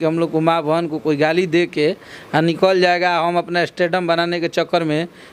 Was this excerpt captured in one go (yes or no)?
yes